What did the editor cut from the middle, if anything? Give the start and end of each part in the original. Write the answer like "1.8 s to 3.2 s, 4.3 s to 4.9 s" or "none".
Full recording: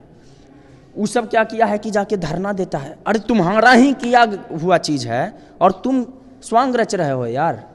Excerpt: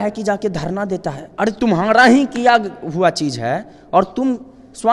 none

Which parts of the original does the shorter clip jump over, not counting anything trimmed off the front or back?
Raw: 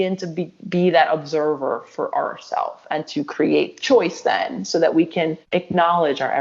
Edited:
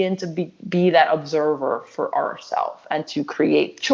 none

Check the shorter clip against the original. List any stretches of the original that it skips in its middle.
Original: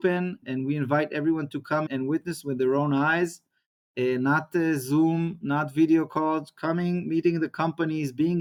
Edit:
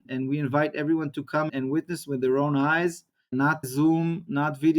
4.0 s to 4.8 s

